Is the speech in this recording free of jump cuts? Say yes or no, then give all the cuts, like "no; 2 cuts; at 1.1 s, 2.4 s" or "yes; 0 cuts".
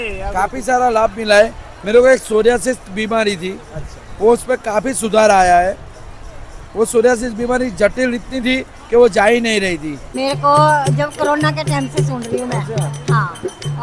no; 1 cut; at 10.1 s